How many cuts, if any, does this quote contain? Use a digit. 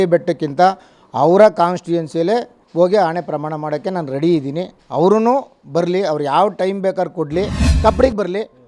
3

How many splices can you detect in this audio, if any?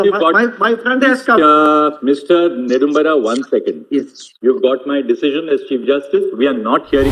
0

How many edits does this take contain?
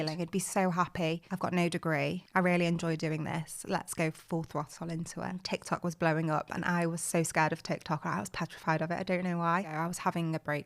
3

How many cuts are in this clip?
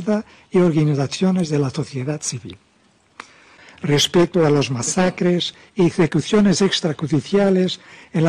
1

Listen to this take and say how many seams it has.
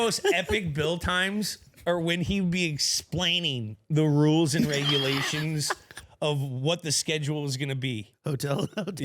1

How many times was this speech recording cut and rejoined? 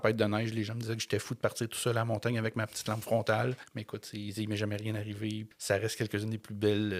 2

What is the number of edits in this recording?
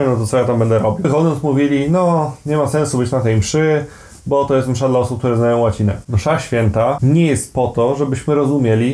3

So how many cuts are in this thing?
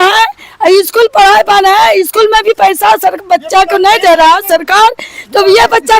0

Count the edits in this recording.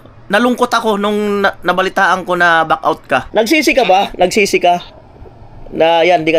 1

